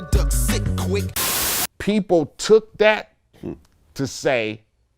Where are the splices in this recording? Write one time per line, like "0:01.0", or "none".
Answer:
0:01.3

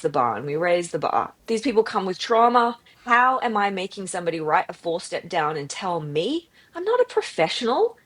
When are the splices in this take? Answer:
0:01.3
0:02.9

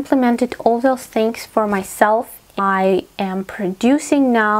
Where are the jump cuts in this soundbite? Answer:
0:02.6

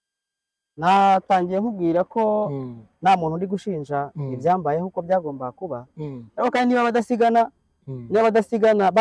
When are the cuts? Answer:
none

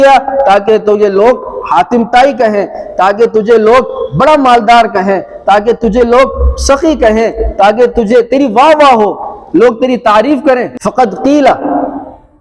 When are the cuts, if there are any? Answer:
0:10.7

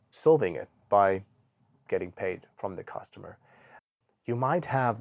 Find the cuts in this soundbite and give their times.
0:03.8

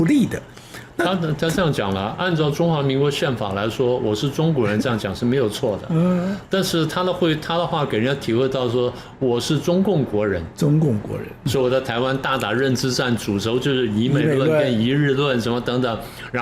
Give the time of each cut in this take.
0:11.5

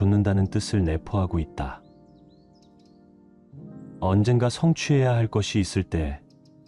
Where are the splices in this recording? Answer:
none

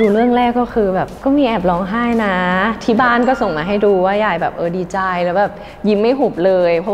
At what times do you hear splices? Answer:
none

